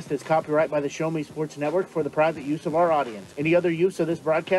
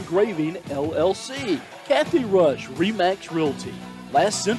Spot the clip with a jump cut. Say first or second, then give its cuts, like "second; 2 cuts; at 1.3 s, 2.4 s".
second; 1 cut; at 1.7 s